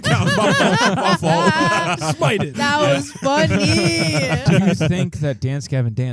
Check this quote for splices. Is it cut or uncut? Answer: cut